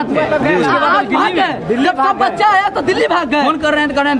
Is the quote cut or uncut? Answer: uncut